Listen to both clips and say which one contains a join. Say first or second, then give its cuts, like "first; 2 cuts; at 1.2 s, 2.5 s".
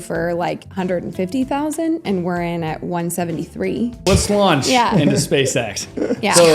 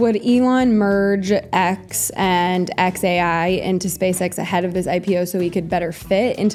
first; 1 cut; at 4.0 s